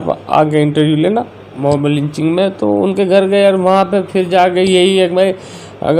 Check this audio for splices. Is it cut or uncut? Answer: cut